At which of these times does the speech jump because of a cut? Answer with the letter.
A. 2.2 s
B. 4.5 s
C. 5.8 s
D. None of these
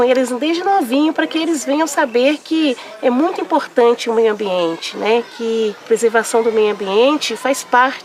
C